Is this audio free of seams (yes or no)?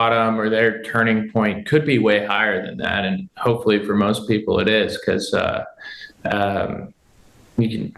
yes